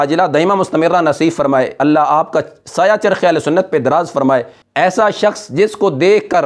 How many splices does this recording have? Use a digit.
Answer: 1